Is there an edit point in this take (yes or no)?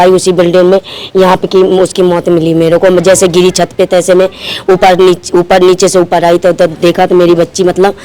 no